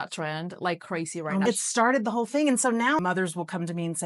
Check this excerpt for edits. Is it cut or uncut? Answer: cut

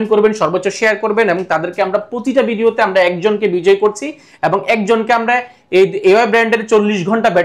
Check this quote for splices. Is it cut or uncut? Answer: uncut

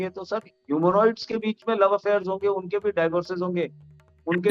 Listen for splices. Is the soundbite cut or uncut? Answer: uncut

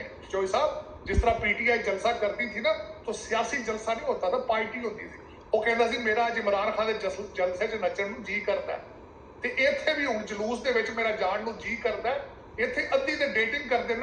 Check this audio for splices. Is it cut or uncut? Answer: uncut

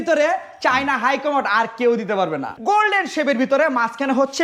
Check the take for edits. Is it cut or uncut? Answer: cut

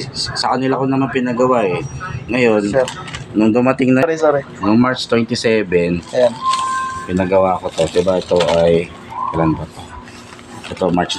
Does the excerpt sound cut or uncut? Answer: uncut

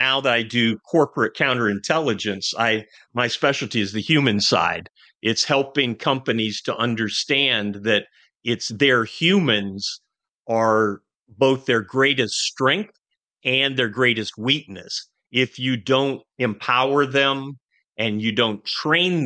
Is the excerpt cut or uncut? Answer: uncut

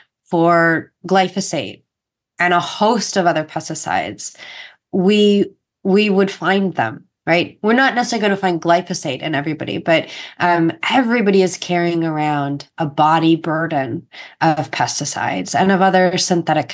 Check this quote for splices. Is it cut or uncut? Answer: uncut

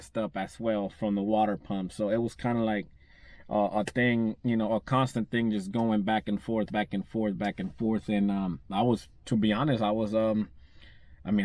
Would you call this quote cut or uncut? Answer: uncut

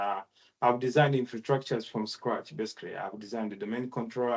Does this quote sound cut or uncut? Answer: uncut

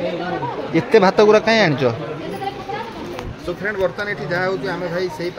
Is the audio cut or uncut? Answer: uncut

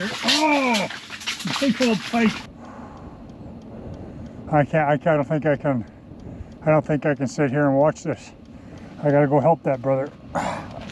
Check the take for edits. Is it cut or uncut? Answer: cut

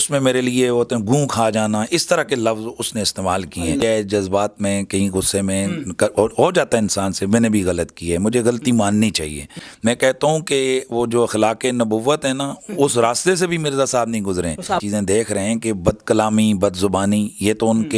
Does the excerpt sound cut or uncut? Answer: cut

